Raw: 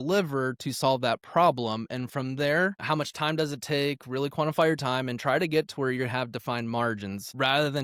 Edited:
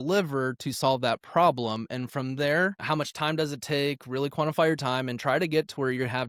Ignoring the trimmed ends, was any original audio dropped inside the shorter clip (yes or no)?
no